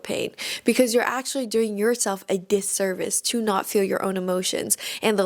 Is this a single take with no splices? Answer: yes; 0 cuts

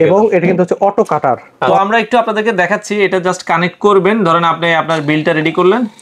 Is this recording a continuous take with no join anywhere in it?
no; 1 cut; at 1.6 s

